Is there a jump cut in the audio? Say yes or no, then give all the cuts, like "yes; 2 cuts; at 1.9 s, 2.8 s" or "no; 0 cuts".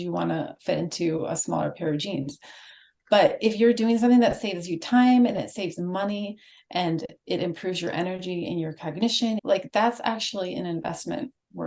yes; 1 cut; at 9.4 s